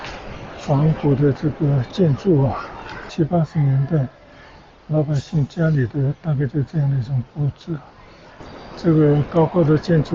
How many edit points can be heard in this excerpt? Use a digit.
2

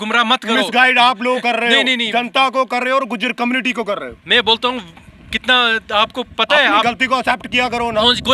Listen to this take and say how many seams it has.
0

